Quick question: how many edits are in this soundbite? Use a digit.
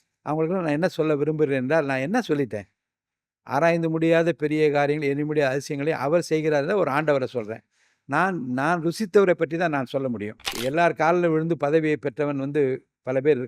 1